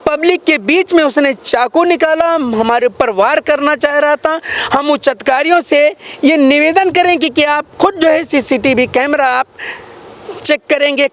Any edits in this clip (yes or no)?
no